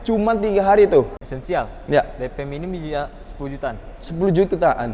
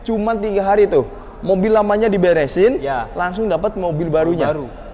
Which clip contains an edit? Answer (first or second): first